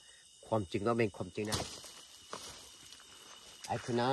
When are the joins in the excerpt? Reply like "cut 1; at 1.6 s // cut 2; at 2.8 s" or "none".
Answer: cut 1; at 1.5 s